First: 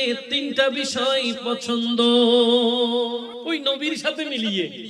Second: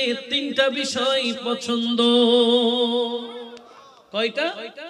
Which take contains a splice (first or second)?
first